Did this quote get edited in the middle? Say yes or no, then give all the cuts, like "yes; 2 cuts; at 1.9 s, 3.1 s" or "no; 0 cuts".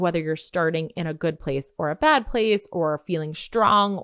no; 0 cuts